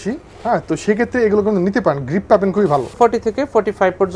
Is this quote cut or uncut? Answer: uncut